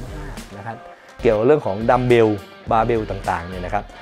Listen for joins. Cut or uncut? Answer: cut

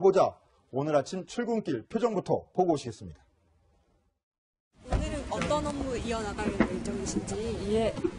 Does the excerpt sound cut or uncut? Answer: uncut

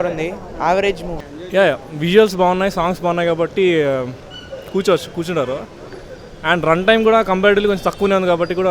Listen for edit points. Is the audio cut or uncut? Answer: cut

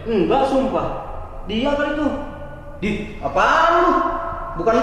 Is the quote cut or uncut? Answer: uncut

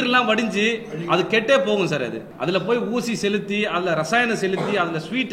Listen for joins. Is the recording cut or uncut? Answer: cut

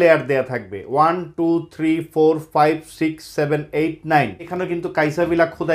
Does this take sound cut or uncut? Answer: cut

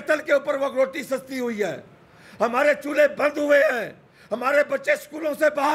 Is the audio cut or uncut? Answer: uncut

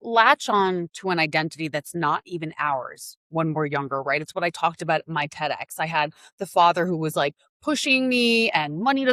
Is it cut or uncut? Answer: uncut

